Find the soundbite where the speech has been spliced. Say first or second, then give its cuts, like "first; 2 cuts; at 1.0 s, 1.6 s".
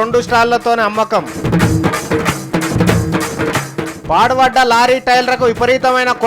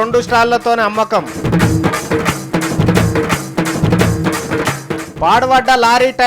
first; 1 cut; at 2.8 s